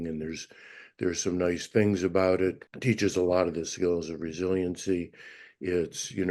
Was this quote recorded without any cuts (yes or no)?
no